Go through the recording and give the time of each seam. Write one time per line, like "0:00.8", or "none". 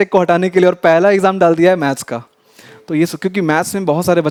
none